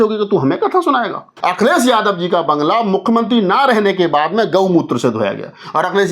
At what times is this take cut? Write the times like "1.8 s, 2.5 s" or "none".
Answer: 1.3 s

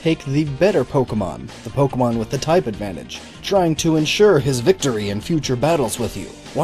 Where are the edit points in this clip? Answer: 3.5 s

